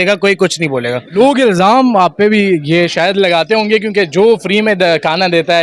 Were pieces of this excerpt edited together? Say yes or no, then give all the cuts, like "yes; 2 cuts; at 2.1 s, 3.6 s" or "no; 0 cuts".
yes; 1 cut; at 1.1 s